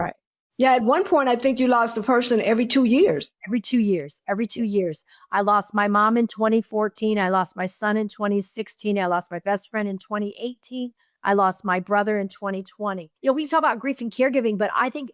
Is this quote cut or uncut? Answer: cut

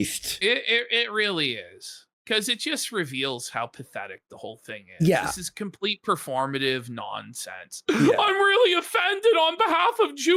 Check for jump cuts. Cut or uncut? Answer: uncut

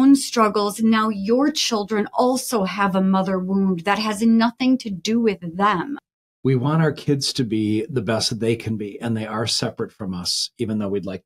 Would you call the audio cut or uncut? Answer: cut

